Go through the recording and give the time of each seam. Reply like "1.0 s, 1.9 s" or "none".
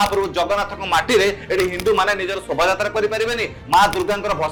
none

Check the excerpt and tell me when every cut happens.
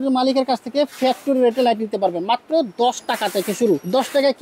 none

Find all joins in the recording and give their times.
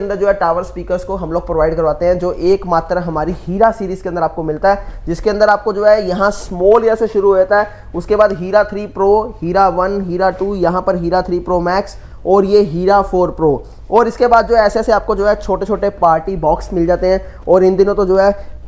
none

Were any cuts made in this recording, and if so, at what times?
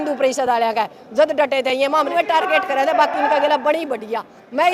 2.1 s

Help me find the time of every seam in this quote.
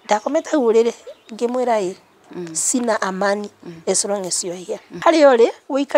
4.9 s

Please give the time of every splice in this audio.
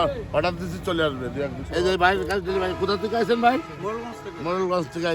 1.6 s

